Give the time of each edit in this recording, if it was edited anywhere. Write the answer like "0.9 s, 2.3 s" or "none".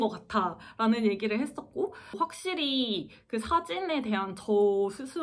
2.2 s